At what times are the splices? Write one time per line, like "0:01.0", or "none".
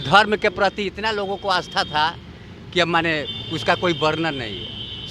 none